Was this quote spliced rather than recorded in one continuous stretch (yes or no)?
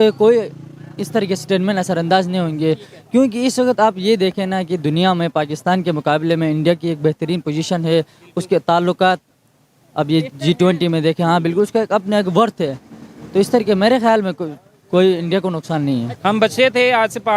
yes